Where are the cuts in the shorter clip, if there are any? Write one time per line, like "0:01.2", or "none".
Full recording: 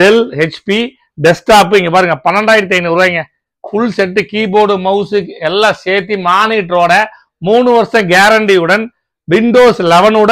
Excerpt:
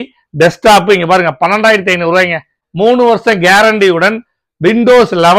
0:02.6